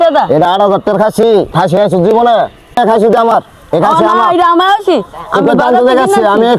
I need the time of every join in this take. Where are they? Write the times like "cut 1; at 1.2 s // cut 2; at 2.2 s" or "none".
cut 1; at 2.8 s